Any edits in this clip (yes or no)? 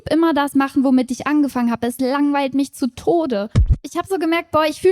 yes